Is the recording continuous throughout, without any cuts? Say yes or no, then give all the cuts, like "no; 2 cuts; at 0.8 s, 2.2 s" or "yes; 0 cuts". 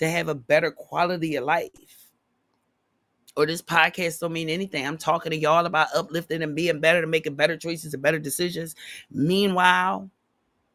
yes; 0 cuts